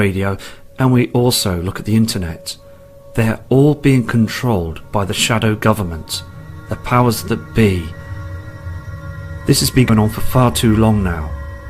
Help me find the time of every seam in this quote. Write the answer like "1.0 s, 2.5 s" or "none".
4.1 s